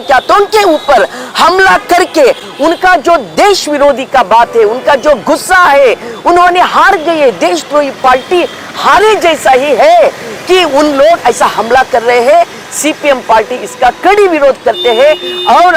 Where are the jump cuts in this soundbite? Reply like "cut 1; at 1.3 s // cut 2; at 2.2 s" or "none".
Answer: none